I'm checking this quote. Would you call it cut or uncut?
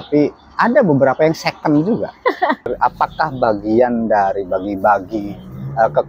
cut